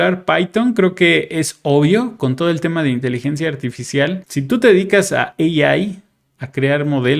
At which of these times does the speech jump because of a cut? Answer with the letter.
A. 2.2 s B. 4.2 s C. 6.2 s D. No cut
D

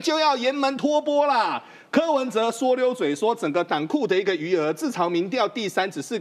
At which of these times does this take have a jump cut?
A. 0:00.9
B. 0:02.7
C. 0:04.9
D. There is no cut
D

